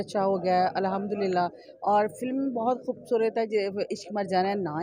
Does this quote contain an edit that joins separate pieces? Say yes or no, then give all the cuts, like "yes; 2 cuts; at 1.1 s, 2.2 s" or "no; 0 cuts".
no; 0 cuts